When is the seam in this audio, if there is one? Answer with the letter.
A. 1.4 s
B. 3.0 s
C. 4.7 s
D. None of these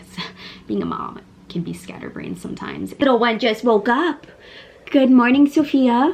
B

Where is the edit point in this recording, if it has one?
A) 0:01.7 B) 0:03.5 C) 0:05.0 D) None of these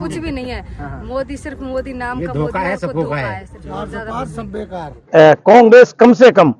C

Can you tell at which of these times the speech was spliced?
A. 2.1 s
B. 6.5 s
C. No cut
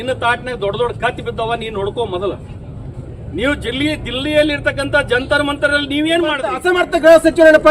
B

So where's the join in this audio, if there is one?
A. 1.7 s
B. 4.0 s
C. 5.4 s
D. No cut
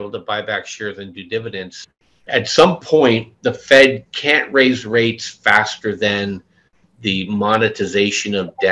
A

